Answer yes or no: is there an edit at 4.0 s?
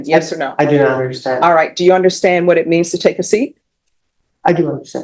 no